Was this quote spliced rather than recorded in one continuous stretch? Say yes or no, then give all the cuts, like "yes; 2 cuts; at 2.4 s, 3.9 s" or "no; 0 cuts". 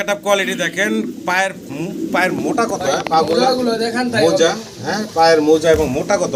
no; 0 cuts